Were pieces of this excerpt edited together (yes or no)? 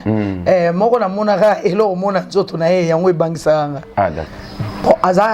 yes